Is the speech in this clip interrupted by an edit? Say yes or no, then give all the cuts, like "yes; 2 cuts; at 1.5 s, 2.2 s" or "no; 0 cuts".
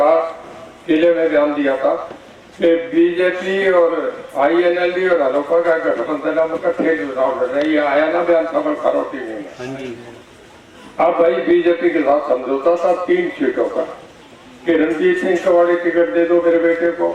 no; 0 cuts